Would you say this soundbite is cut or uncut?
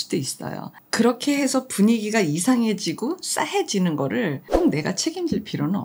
cut